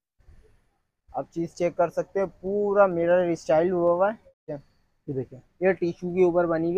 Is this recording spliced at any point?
yes; 1 cut; at 4.6 s

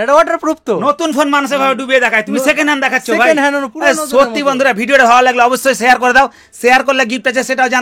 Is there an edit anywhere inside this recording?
no; 0 cuts

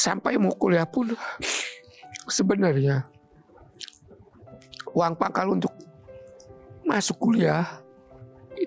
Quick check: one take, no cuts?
yes; 0 cuts

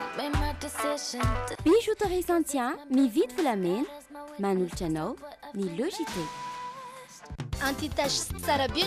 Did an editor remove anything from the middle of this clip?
yes; 1 cut; at 7.3 s

